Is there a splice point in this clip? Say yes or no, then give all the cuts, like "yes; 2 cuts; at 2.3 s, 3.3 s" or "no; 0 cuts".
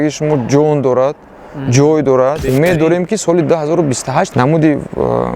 yes; 2 cuts; at 2.4 s, 4.3 s